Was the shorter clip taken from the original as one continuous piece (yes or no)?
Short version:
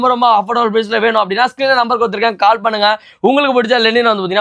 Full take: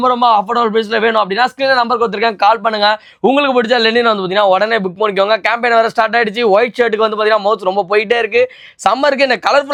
yes